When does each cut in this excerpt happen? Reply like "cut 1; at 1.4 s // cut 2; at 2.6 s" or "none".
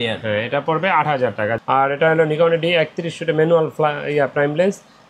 cut 1; at 1.6 s